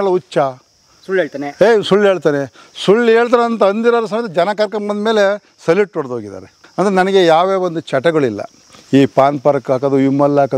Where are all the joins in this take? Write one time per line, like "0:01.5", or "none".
0:06.6

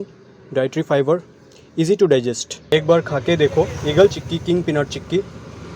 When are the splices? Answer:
0:02.7

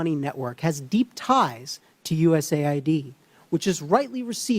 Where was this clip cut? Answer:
none

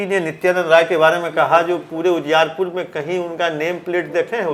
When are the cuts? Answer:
none

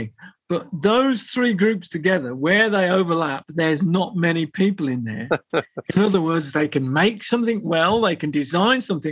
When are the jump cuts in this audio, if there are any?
none

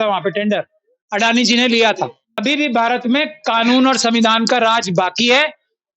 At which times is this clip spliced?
0:02.3

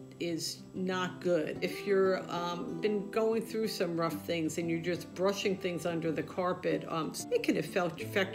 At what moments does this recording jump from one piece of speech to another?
0:01.6
0:07.2

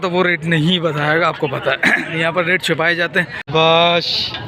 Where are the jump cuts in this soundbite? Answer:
0:03.5

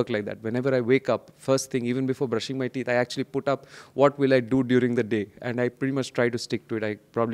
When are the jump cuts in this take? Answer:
none

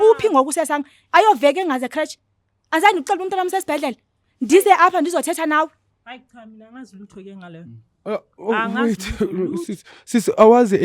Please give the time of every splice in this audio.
none

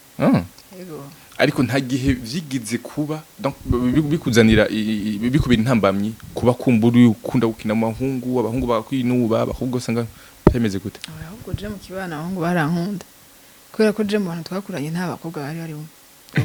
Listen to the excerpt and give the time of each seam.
none

